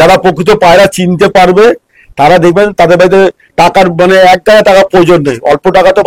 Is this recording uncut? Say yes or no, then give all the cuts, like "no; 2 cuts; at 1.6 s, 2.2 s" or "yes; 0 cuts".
yes; 0 cuts